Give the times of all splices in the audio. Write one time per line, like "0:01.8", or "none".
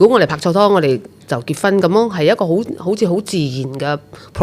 none